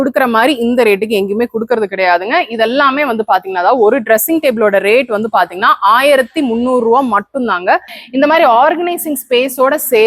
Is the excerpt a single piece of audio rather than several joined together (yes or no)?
no